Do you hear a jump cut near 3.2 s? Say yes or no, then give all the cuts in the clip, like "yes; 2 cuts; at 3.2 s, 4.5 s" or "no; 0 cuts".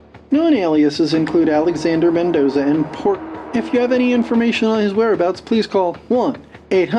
yes; 1 cut; at 3.2 s